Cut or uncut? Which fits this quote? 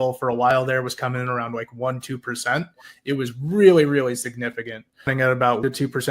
cut